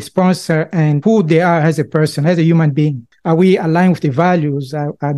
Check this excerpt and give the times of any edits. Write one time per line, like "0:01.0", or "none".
0:03.1